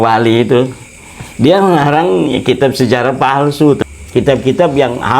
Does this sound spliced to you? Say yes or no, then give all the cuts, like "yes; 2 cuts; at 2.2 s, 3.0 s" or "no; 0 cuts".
yes; 1 cut; at 3.8 s